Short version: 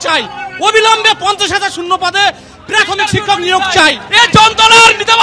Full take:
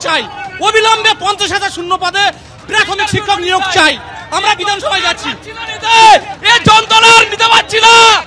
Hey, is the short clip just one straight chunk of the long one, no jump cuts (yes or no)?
no